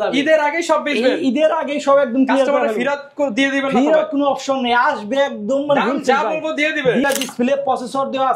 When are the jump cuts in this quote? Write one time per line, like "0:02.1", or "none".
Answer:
0:07.0